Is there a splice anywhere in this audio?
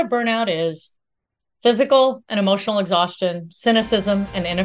no; 0 cuts

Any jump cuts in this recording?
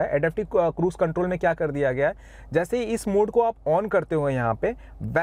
no; 0 cuts

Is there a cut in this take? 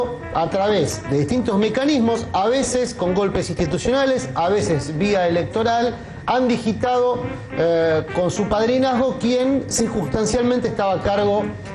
no; 0 cuts

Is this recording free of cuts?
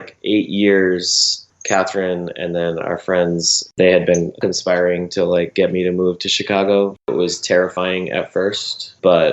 no; 3 cuts; at 3.7 s, 4.4 s, 7.1 s

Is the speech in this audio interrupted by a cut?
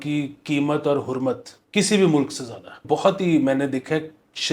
yes; 2 cuts; at 1.5 s, 2.8 s

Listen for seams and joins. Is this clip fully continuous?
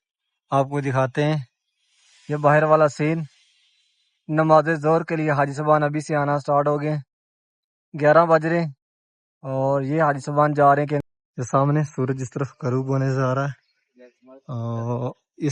no; 1 cut; at 11.1 s

